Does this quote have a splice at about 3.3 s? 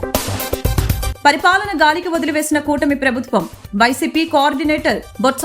no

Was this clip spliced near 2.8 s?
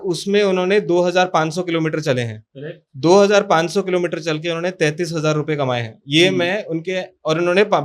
no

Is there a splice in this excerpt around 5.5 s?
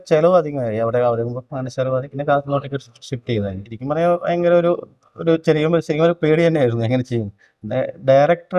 no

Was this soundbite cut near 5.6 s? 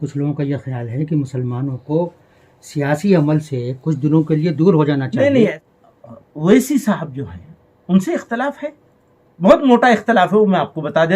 yes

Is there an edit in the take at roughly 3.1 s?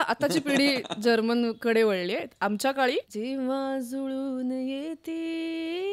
yes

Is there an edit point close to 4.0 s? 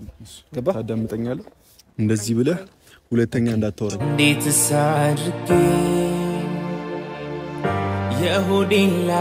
yes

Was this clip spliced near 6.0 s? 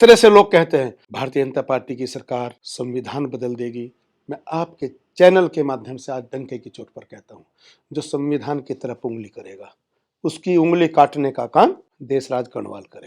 no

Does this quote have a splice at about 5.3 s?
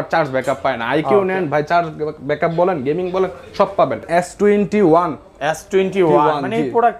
no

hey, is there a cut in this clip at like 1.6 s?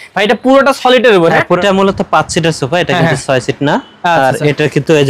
yes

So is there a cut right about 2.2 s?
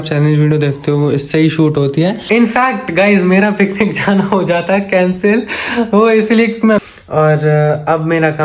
yes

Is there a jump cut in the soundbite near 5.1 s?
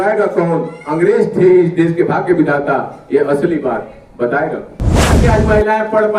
yes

